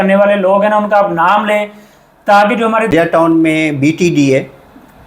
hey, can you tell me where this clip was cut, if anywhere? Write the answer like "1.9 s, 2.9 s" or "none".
3.2 s